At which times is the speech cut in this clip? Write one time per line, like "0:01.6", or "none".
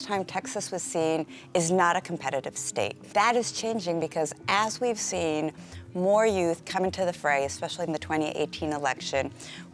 none